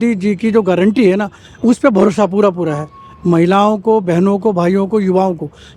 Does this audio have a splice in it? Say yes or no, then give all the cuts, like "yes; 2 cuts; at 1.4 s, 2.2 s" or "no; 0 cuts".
no; 0 cuts